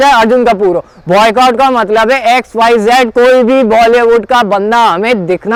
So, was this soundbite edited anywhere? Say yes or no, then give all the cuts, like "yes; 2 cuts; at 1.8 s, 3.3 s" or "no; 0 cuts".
no; 0 cuts